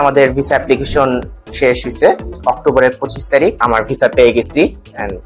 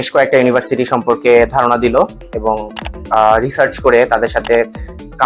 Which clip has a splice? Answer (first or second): first